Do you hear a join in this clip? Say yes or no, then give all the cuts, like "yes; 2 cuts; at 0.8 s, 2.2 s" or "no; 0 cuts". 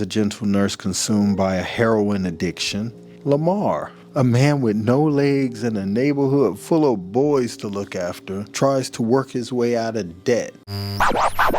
yes; 1 cut; at 10.6 s